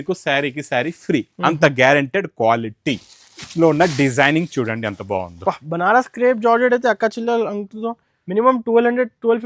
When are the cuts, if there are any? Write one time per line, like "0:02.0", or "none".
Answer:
none